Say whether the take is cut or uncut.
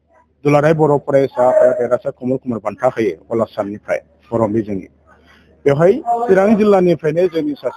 uncut